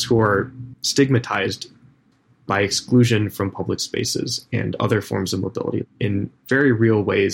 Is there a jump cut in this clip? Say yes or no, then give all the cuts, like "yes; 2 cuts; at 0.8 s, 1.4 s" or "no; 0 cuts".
yes; 2 cuts; at 2.1 s, 5.9 s